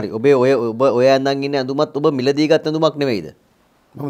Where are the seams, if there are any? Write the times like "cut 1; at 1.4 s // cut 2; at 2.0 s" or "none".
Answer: none

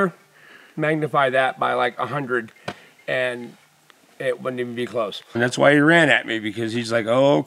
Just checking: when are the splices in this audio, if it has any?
cut 1; at 5.4 s

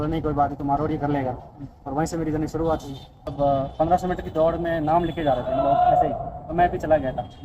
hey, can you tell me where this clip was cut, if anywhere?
cut 1; at 3.3 s

